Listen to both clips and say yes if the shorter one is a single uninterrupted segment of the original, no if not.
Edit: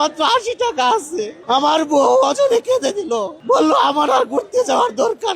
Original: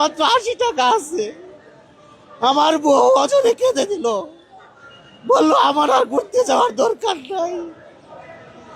no